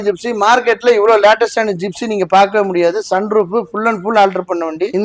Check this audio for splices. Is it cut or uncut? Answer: uncut